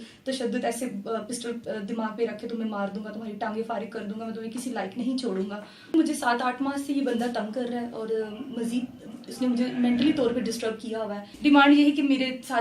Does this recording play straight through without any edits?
no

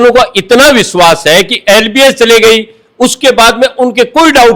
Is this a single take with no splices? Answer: yes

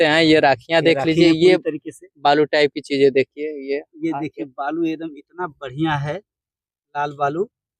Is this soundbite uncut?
yes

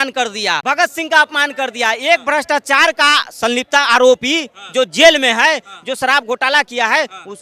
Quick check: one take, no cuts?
yes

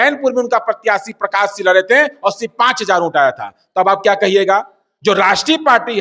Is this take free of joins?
yes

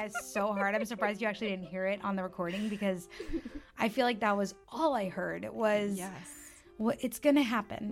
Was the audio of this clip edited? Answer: no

